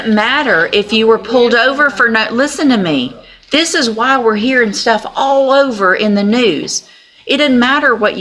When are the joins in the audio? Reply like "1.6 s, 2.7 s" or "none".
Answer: none